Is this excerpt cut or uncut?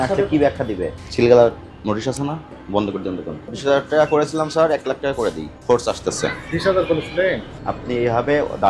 cut